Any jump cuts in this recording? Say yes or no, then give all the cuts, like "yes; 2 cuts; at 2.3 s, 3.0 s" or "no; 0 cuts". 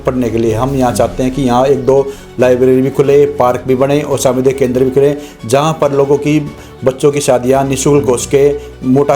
no; 0 cuts